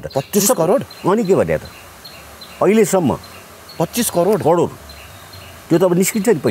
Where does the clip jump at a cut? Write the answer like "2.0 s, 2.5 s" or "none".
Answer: none